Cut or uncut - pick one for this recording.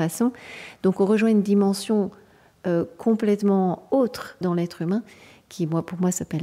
cut